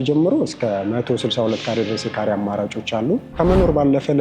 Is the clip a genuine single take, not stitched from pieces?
no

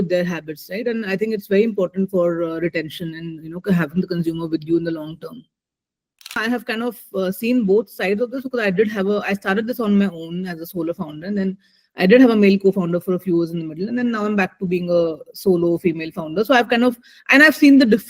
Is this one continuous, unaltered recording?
no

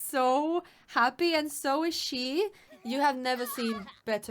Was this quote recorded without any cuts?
no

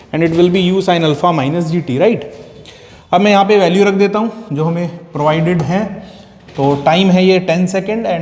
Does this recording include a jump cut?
no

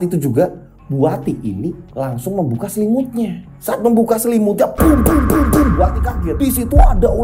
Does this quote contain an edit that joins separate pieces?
no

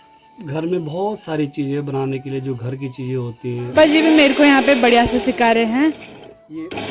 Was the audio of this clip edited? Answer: yes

